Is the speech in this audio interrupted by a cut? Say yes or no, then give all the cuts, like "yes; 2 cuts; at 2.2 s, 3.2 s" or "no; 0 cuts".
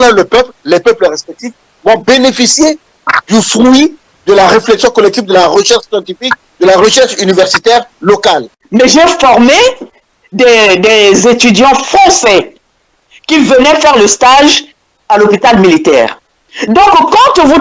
yes; 1 cut; at 8.5 s